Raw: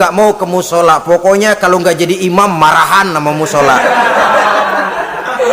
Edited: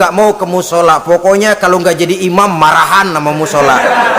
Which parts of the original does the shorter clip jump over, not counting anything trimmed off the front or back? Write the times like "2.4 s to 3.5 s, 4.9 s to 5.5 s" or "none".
none